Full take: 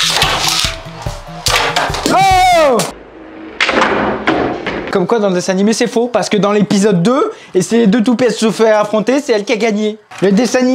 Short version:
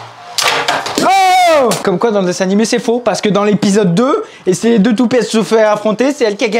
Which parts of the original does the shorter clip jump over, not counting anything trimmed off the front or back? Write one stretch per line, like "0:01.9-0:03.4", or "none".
0:02.9-0:04.9